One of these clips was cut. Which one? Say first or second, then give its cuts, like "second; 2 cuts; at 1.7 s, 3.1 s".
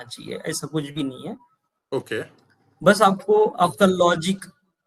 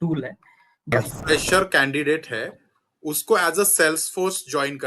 second; 1 cut; at 0.9 s